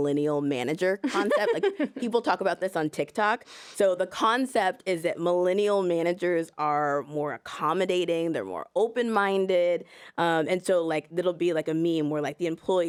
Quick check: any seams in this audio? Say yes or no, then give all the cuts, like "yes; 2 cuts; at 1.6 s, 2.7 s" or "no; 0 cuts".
no; 0 cuts